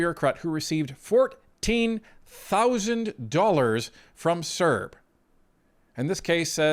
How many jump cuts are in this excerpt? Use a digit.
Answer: 0